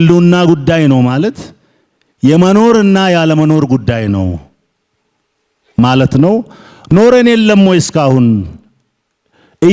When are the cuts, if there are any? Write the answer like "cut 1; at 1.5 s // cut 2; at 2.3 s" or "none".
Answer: none

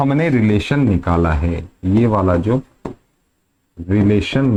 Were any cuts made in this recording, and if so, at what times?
none

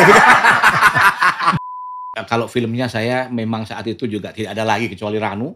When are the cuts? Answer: cut 1; at 1.6 s

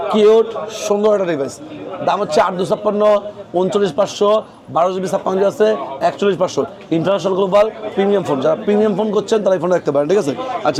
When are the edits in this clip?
none

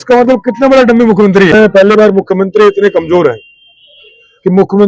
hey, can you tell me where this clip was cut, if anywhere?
cut 1; at 1.5 s

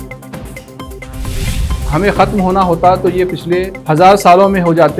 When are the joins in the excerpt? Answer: cut 1; at 0.9 s

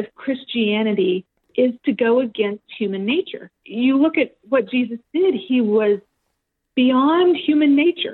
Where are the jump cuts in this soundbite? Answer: cut 1; at 1.4 s // cut 2; at 3.6 s

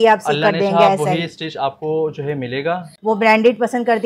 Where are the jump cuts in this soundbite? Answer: cut 1; at 2.9 s

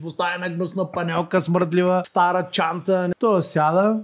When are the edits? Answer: cut 1; at 2.1 s // cut 2; at 3.1 s

